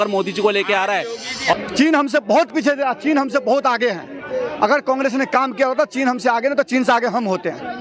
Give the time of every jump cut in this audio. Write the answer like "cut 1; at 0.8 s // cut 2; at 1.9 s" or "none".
cut 1; at 1.5 s